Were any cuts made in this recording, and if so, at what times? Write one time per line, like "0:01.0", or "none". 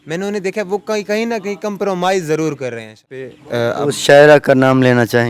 0:03.4